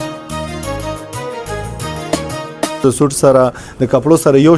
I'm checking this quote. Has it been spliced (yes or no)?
yes